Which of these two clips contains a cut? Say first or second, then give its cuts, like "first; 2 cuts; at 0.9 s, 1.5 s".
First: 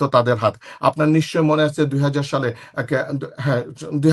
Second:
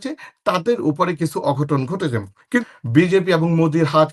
second; 1 cut; at 2.6 s